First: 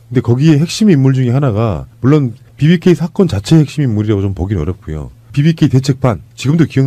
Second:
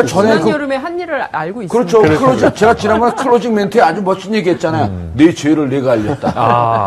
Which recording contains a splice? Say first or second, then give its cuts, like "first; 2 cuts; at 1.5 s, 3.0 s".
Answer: second; 1 cut; at 5.1 s